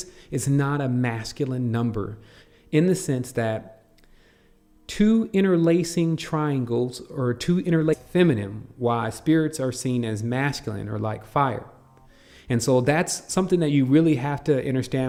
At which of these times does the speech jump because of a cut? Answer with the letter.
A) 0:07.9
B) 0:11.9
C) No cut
C